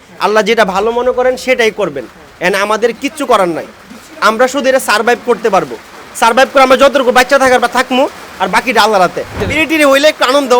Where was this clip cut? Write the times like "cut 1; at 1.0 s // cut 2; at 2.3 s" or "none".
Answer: cut 1; at 9.4 s